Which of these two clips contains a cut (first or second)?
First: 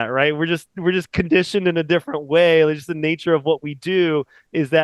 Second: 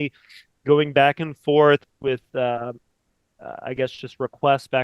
second